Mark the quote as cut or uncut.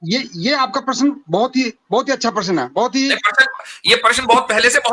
uncut